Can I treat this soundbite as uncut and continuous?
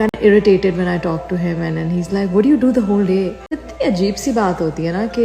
no; 1 cut; at 3.6 s

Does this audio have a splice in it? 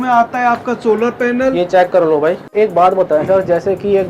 yes; 1 cut; at 2.5 s

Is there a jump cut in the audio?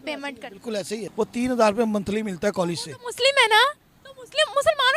yes; 1 cut; at 1.0 s

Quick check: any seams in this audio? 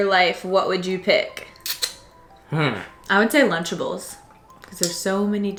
no; 0 cuts

